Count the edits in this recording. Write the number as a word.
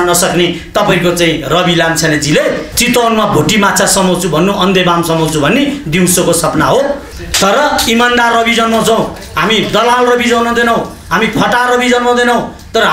two